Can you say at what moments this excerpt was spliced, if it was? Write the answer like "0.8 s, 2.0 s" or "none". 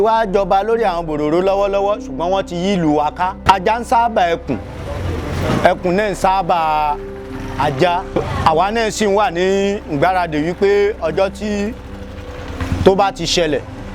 3.4 s, 8.2 s